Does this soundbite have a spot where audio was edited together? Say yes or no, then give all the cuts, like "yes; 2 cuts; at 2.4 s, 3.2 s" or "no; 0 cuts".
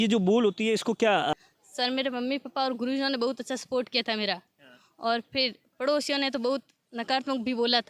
yes; 1 cut; at 1.3 s